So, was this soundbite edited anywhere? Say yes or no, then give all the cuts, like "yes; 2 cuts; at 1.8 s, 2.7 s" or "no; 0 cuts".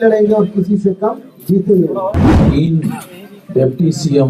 yes; 1 cut; at 2.4 s